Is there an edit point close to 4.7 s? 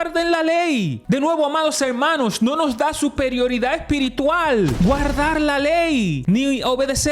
yes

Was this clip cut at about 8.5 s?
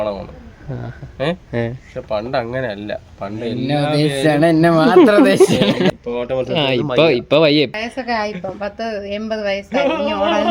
no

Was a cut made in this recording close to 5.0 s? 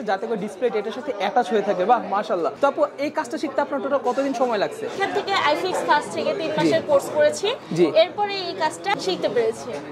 yes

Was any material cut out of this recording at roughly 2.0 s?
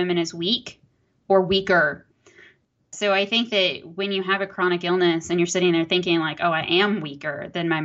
yes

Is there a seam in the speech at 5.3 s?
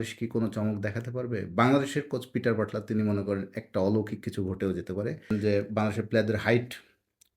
yes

